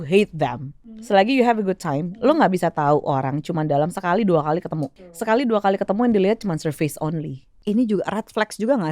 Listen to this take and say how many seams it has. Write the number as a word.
three